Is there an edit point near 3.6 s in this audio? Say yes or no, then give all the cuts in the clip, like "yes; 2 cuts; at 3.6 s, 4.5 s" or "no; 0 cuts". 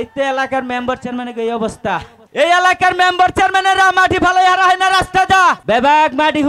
no; 2 cuts; at 2.2 s, 5.6 s